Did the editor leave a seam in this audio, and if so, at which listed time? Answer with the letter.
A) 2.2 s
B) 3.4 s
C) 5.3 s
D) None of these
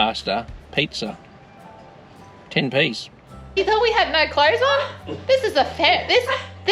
B